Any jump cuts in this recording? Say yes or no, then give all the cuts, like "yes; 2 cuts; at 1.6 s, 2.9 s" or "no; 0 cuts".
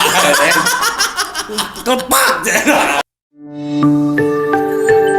yes; 1 cut; at 3.0 s